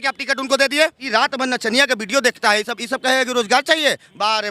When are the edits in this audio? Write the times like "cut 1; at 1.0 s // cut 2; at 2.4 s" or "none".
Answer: cut 1; at 1.0 s